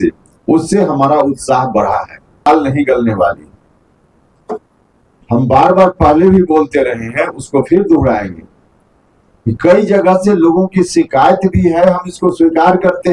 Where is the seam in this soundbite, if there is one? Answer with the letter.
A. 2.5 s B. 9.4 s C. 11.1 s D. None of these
A